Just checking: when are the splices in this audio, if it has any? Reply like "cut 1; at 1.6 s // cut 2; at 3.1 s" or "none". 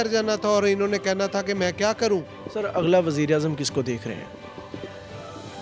none